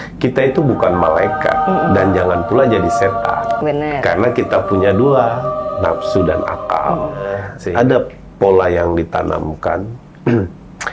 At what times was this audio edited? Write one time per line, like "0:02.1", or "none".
0:07.5